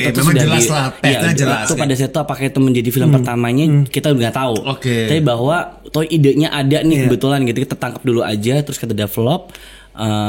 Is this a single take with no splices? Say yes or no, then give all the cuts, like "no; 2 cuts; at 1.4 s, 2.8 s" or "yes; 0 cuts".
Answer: no; 2 cuts; at 1.6 s, 5.8 s